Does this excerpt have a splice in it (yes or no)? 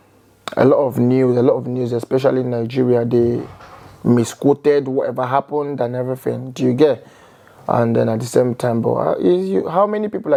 no